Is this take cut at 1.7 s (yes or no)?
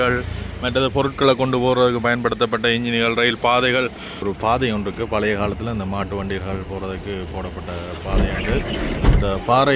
no